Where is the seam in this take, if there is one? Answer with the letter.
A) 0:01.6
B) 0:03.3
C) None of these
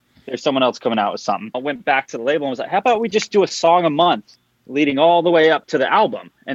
A